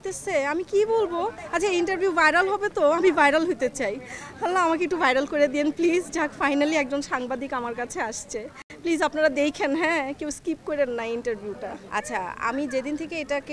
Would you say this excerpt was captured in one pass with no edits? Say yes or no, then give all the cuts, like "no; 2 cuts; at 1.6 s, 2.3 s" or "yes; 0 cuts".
yes; 0 cuts